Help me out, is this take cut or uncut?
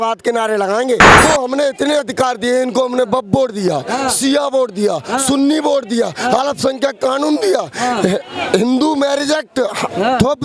cut